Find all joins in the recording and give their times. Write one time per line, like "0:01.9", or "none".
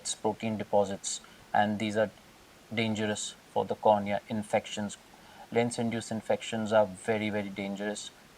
none